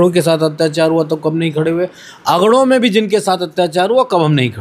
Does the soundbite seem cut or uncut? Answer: uncut